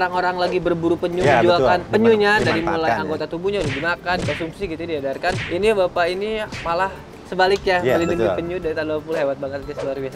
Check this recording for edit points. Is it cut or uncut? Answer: uncut